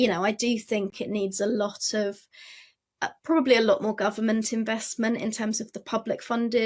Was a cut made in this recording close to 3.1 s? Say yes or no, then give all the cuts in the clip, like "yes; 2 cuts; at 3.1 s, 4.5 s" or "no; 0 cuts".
no; 1 cut; at 0.9 s